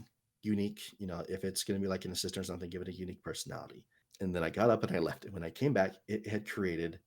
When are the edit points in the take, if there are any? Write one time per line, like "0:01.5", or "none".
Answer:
0:04.0